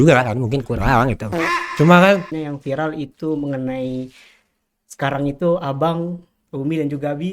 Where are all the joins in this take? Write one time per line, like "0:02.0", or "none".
0:02.3